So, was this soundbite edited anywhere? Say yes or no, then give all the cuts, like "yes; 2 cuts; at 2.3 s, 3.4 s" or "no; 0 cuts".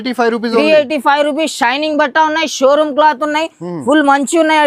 no; 0 cuts